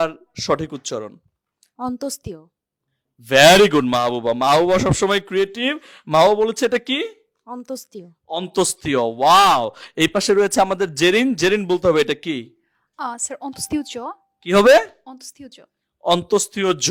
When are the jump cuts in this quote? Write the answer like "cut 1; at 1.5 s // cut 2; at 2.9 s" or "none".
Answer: none